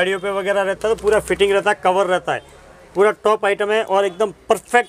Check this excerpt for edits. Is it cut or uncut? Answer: uncut